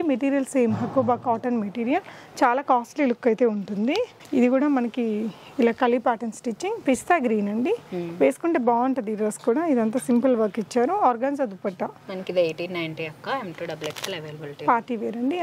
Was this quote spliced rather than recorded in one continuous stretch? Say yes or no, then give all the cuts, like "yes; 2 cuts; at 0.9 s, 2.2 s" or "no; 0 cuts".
no; 0 cuts